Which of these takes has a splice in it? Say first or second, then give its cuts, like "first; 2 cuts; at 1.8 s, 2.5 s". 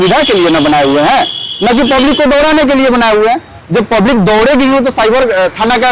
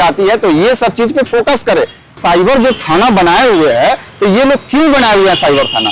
second; 1 cut; at 2.2 s